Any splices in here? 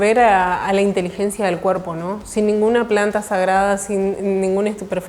no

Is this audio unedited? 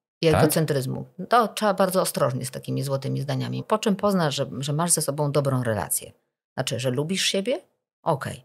no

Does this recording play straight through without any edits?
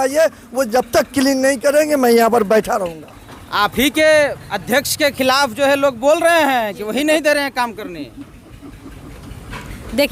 yes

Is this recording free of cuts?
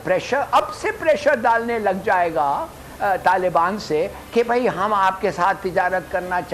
yes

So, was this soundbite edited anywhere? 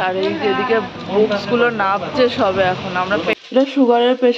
yes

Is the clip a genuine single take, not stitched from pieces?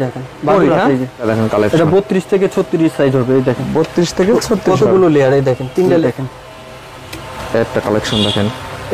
no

